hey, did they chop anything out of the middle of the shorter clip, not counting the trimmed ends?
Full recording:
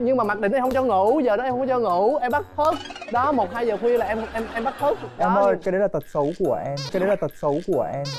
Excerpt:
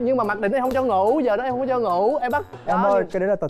yes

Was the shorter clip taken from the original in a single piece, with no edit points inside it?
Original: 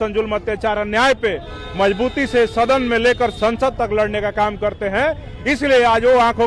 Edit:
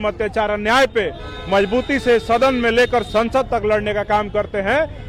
yes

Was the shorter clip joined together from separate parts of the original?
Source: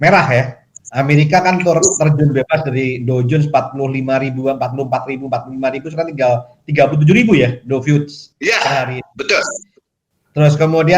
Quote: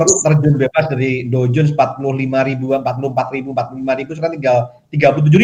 no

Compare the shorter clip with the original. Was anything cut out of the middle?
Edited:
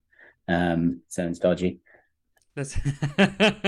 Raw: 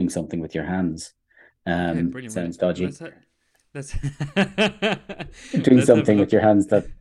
no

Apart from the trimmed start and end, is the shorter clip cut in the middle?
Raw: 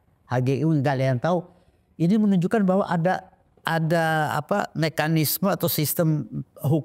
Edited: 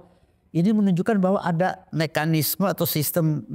yes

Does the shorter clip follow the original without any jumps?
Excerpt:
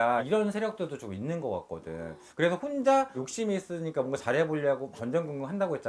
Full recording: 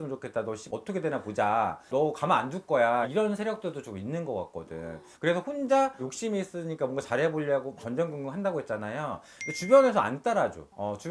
yes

